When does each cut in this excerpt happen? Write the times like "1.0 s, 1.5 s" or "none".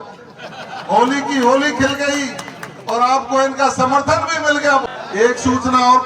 4.8 s